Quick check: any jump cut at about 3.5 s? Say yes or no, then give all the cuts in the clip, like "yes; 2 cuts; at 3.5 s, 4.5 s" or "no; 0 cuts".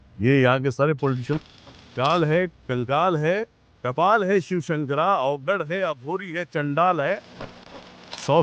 no; 2 cuts; at 1.4 s, 7.6 s